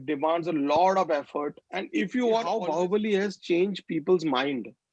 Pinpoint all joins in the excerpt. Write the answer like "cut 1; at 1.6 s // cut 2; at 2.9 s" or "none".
cut 1; at 2.5 s